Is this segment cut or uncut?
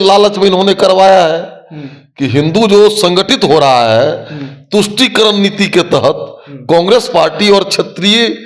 uncut